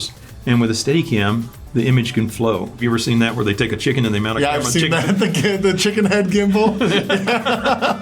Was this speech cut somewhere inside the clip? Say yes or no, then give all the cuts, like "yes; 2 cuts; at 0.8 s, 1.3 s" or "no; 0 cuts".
yes; 1 cut; at 2.8 s